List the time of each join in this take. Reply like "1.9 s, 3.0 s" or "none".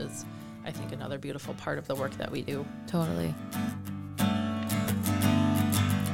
3.4 s